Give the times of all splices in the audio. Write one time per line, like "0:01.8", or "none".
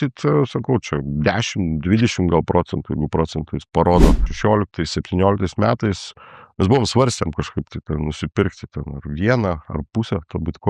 0:04.2